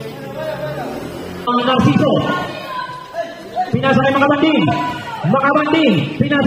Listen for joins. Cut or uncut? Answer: cut